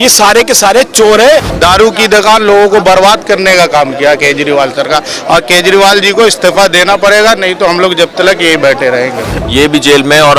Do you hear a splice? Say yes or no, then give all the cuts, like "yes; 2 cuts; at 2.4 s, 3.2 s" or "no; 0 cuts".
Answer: yes; 2 cuts; at 1.5 s, 9.4 s